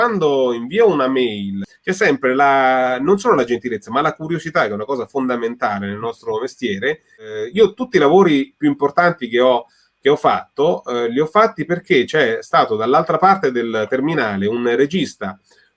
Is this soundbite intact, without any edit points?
no; 2 cuts; at 1.7 s, 7.3 s

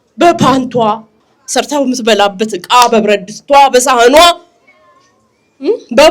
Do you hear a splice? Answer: no; 0 cuts

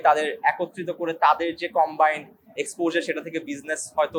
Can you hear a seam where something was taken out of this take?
no; 0 cuts

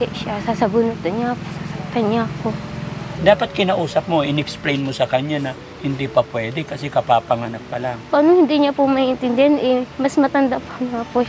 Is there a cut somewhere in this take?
yes; 1 cut; at 3.1 s

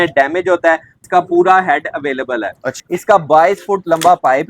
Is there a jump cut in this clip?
yes; 2 cuts; at 1.1 s, 2.7 s

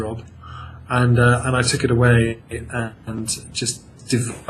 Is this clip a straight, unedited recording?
yes; 0 cuts

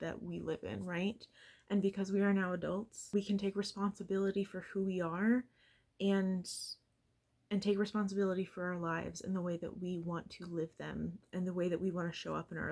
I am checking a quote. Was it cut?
yes; 2 cuts; at 3.0 s, 11.2 s

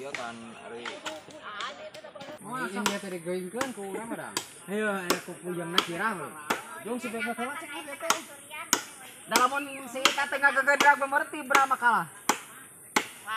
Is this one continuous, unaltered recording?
no; 1 cut; at 2.3 s

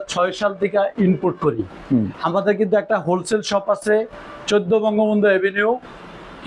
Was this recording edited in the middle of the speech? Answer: no; 0 cuts

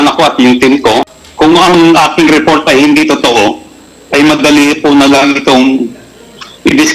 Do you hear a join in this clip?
yes; 1 cut; at 1.2 s

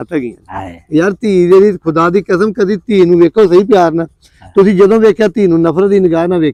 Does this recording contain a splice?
no; 0 cuts

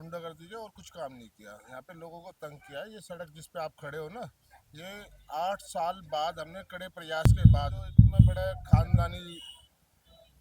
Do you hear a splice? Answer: yes; 2 cuts; at 7.2 s, 9.0 s

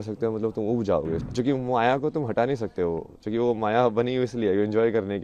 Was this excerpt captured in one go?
no; 1 cut; at 1.3 s

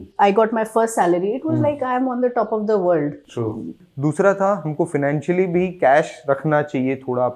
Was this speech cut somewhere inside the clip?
yes; 1 cut; at 3.7 s

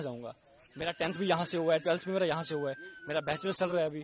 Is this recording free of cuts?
yes; 0 cuts

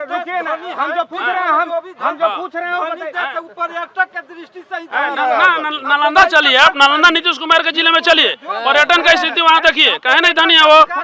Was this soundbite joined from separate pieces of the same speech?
no; 0 cuts

